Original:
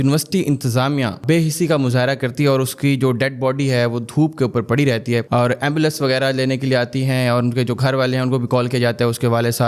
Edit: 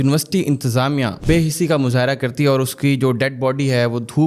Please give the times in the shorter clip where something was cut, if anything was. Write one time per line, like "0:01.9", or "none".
none